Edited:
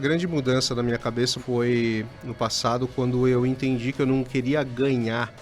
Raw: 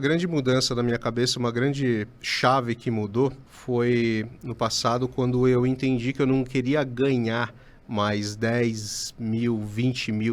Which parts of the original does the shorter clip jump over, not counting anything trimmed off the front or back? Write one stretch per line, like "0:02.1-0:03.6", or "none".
0:01.3-0:03.6